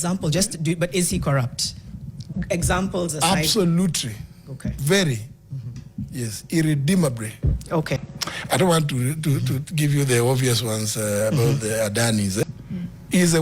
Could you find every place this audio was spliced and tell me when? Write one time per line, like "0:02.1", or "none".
0:08.0
0:12.4